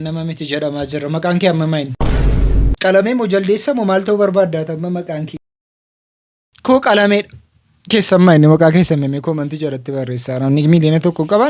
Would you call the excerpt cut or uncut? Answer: uncut